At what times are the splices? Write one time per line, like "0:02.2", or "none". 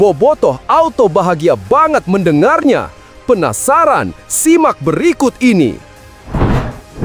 0:06.0